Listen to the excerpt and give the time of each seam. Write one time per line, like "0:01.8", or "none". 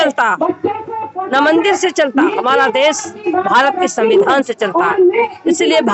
none